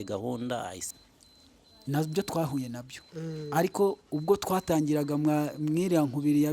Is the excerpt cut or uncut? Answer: cut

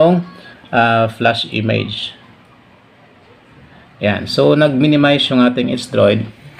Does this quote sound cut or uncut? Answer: uncut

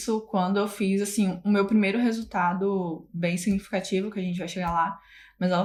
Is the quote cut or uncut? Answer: uncut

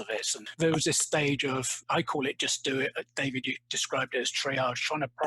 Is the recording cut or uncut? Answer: cut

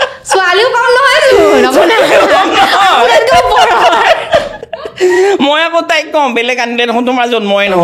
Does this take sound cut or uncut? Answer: uncut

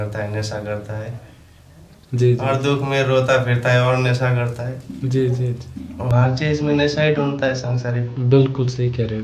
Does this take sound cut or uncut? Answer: uncut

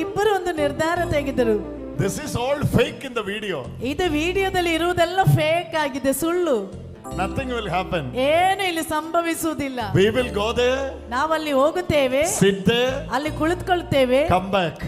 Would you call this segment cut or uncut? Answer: uncut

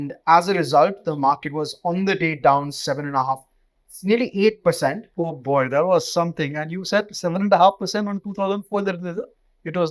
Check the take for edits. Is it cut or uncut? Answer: cut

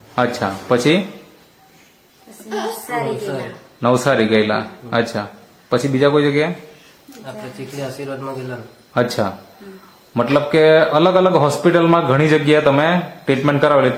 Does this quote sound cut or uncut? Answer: uncut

